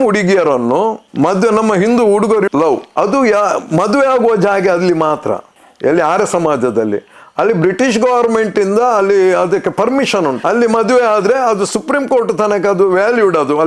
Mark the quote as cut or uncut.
uncut